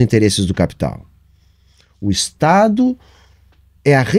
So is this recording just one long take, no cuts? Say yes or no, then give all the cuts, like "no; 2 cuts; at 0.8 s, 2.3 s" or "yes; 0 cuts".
yes; 0 cuts